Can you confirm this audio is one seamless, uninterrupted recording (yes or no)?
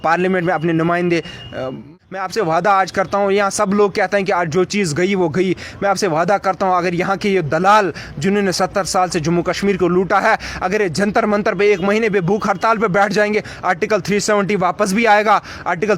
no